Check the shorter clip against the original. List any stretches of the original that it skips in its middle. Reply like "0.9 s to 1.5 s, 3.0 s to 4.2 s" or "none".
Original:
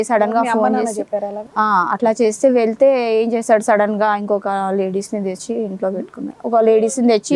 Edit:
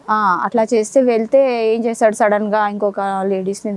none